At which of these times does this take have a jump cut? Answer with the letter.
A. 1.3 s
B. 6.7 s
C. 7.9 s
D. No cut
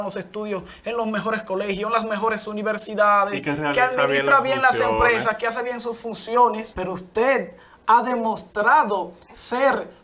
B